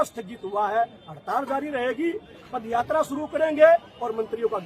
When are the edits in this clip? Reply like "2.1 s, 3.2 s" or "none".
none

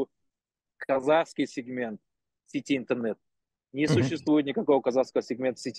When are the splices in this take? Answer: none

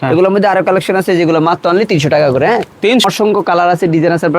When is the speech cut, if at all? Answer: 3.0 s

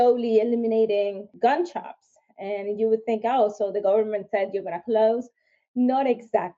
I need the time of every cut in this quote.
1.3 s

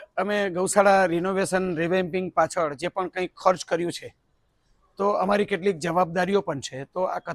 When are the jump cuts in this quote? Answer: none

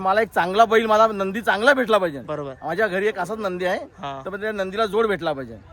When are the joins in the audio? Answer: none

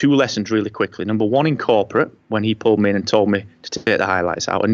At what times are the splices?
none

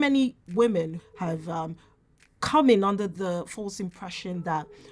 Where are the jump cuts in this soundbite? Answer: 1.0 s

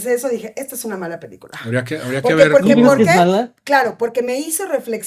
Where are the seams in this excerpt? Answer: none

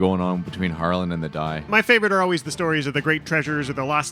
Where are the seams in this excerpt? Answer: 1.7 s

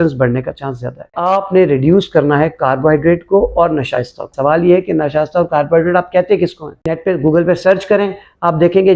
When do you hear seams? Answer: 1.1 s, 6.8 s

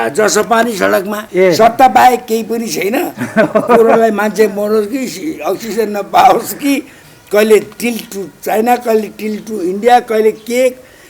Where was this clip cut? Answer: 1.2 s

